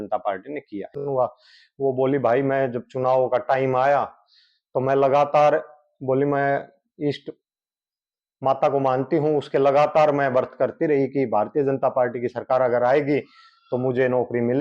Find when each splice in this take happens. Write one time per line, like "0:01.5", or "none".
0:01.0